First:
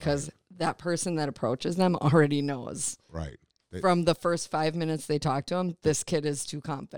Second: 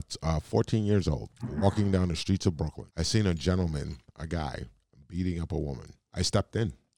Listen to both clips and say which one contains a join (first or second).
second